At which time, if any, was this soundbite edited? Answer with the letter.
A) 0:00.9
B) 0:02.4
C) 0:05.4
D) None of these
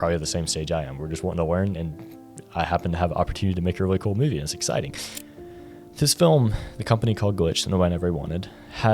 C